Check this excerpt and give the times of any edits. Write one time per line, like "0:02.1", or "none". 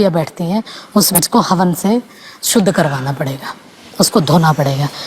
0:01.2